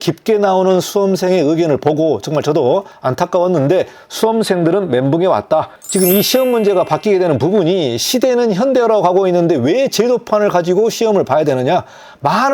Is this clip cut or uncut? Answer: cut